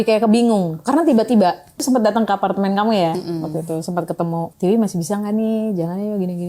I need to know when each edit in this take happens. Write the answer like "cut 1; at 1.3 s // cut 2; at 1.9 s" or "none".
cut 1; at 1.8 s // cut 2; at 4.5 s

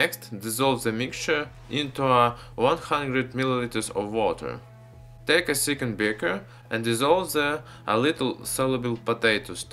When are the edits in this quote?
cut 1; at 1.1 s

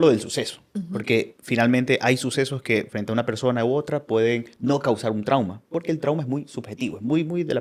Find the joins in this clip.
none

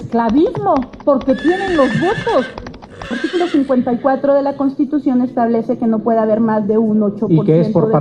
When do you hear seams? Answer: cut 1; at 3.1 s

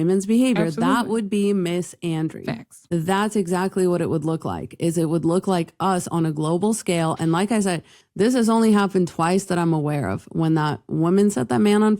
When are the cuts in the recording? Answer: cut 1; at 2.7 s

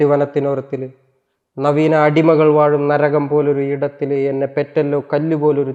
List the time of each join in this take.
none

